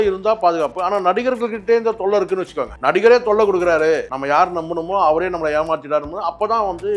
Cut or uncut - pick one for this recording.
cut